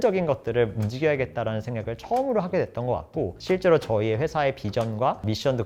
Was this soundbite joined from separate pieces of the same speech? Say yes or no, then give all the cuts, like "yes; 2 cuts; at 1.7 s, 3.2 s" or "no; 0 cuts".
no; 0 cuts